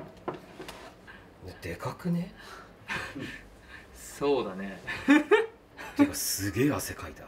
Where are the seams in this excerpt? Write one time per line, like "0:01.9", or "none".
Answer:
0:05.8